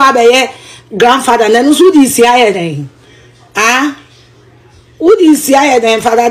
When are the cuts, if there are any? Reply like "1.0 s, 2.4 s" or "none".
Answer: none